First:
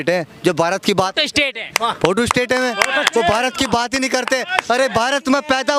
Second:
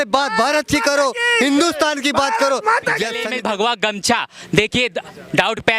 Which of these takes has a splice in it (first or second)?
second